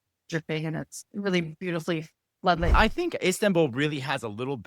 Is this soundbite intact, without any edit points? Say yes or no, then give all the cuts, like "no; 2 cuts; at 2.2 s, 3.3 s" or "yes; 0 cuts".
no; 1 cut; at 2.8 s